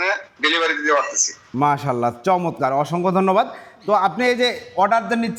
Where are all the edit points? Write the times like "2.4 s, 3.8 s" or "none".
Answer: none